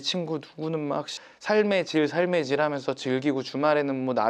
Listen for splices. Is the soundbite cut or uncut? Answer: cut